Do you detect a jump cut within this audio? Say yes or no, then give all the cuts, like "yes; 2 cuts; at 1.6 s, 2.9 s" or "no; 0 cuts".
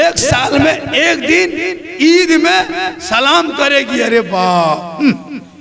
no; 0 cuts